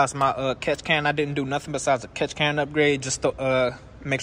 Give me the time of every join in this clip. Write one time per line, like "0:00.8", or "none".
none